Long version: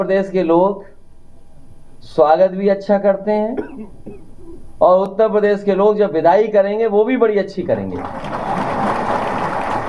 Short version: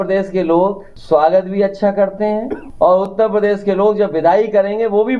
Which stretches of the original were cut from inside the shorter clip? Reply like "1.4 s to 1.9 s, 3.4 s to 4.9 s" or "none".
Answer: 0.9 s to 2.0 s, 3.7 s to 4.6 s